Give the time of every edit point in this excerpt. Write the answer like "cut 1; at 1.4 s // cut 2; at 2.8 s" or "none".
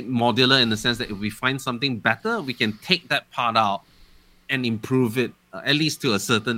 none